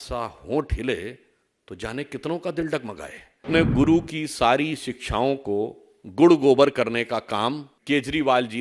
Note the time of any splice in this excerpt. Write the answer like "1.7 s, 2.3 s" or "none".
3.4 s, 7.7 s